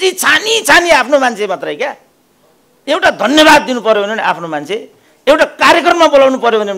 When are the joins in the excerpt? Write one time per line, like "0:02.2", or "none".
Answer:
none